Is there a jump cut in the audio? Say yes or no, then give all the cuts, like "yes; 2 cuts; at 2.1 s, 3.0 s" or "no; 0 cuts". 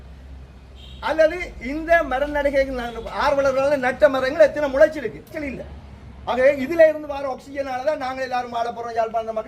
yes; 1 cut; at 5.4 s